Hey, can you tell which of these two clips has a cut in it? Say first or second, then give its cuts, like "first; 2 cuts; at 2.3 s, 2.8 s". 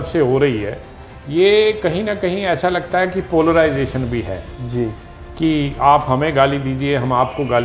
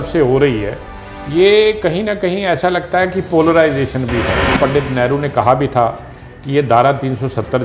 second; 1 cut; at 4.5 s